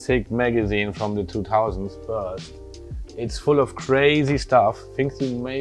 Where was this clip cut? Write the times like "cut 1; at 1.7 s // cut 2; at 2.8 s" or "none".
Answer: none